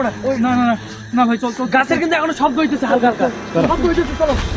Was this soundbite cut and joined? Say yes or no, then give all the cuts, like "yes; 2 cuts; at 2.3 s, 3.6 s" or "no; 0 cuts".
no; 0 cuts